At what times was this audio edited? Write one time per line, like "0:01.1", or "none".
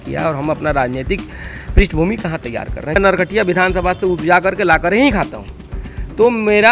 0:03.0